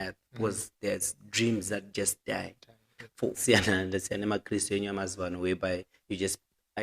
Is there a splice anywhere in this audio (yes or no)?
yes